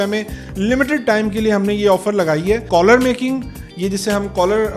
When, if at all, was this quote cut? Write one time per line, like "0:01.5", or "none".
0:02.6